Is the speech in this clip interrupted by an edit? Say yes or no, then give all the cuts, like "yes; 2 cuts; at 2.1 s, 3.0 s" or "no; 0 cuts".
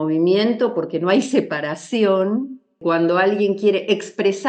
yes; 1 cut; at 2.7 s